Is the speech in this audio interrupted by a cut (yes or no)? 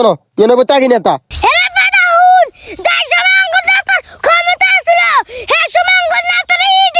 yes